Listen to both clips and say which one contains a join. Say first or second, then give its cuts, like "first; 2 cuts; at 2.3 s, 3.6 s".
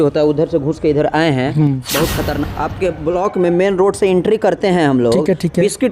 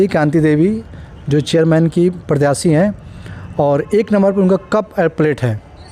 first; 1 cut; at 2.5 s